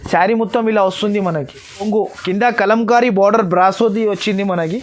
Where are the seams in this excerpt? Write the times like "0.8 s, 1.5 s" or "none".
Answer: 1.8 s